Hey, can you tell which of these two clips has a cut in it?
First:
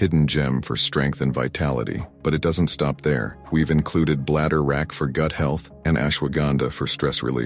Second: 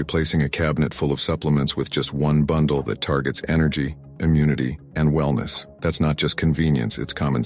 second; 1 cut; at 2.1 s

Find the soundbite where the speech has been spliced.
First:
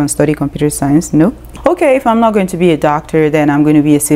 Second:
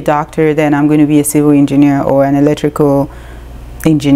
first; 1 cut; at 1.4 s

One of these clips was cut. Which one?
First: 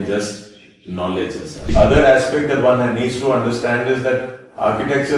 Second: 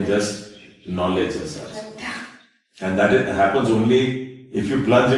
first; 1 cut; at 1.7 s

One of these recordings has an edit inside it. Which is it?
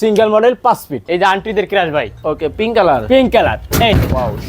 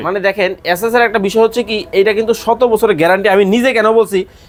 first; 1 cut; at 1.0 s

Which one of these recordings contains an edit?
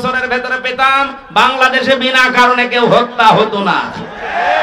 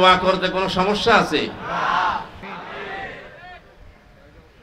second; 1 cut; at 2.4 s

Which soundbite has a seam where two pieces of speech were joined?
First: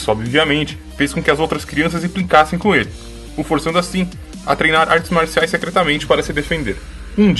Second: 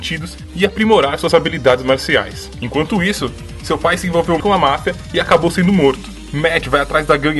second; 1 cut; at 4.0 s

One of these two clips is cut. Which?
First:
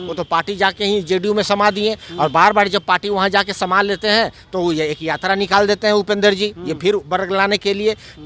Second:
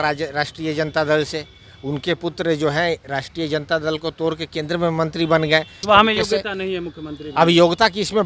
second; 1 cut; at 5.7 s

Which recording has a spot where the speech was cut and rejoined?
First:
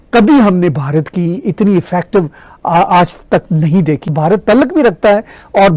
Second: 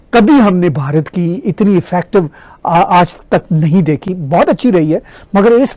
first; 1 cut; at 4.1 s

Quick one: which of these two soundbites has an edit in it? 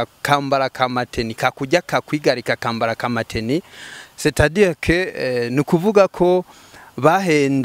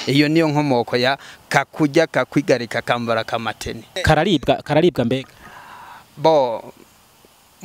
second; 1 cut; at 4.0 s

